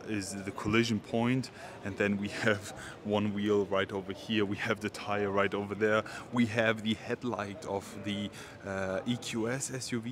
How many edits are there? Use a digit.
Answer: 0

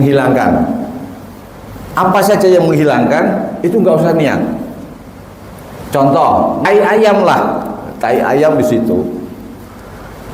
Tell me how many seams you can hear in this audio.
1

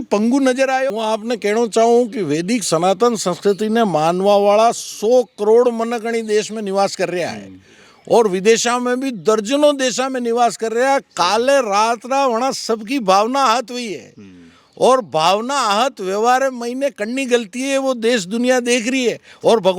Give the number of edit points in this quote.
1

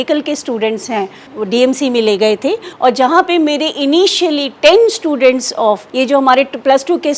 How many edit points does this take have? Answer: 3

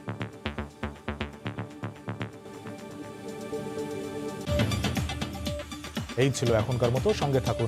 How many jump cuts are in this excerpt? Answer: 0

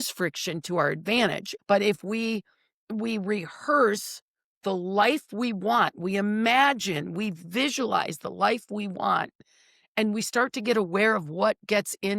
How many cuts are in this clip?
1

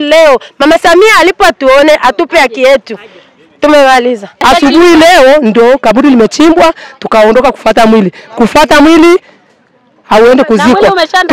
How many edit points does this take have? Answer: 1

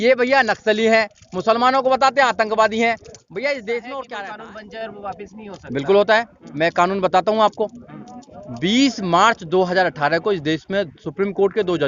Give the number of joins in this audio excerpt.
1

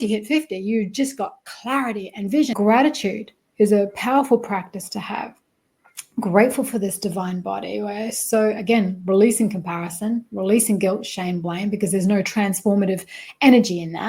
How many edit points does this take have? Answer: 1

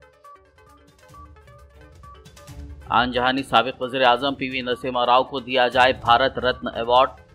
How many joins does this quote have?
1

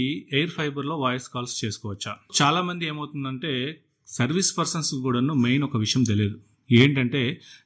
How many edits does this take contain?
1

